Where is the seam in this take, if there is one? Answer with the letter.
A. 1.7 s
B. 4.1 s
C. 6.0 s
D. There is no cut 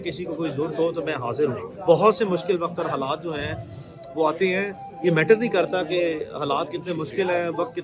A